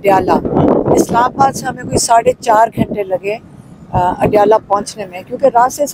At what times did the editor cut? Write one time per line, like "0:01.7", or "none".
none